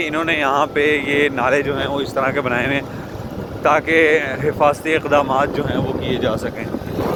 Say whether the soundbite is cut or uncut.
uncut